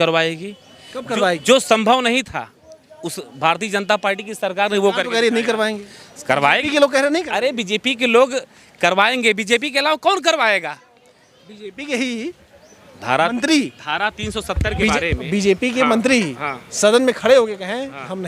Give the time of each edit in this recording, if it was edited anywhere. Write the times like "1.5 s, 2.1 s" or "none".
none